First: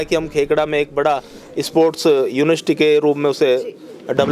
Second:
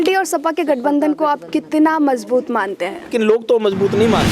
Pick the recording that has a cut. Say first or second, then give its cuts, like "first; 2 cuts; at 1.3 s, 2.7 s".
second; 1 cut; at 3.1 s